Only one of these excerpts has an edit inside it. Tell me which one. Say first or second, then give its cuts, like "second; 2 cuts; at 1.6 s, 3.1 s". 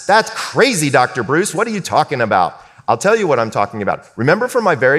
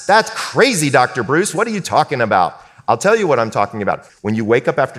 second; 1 cut; at 4.1 s